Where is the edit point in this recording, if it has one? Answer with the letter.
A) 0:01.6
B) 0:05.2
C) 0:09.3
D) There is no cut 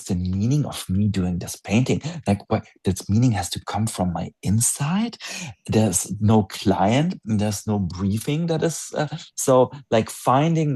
D